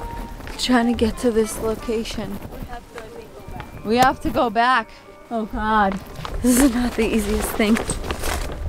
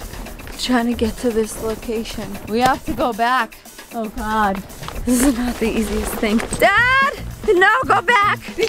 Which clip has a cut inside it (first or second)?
second